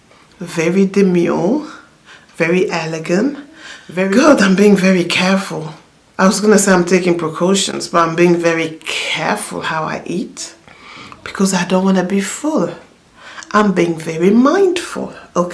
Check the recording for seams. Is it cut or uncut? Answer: uncut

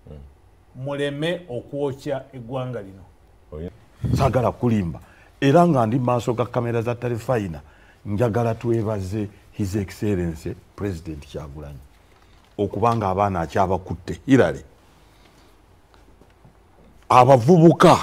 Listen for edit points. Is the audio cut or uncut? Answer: cut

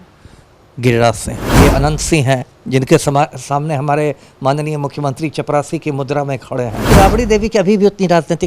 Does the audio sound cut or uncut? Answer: cut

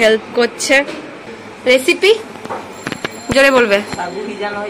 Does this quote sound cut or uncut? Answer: cut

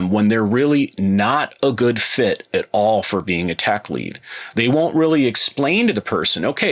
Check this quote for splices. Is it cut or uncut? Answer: uncut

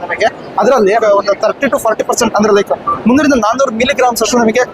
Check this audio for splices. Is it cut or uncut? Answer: cut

